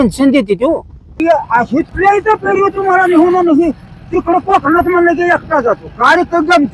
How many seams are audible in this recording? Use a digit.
1